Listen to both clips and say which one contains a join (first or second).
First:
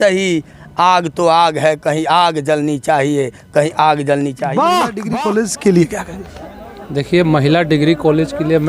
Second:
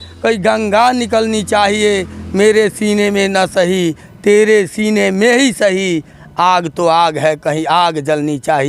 first